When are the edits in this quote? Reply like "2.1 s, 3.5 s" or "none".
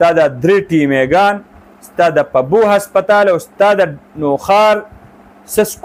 none